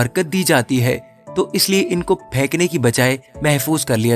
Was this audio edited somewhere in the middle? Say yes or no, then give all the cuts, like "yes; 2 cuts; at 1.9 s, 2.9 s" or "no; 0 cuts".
no; 0 cuts